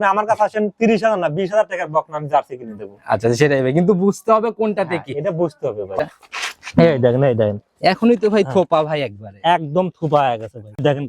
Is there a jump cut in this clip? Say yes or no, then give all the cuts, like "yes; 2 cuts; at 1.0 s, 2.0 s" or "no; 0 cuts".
yes; 1 cut; at 5.9 s